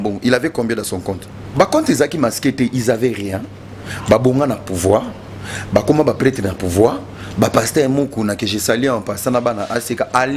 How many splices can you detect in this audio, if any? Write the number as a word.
one